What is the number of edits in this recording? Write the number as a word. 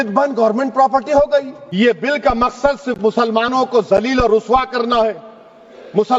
one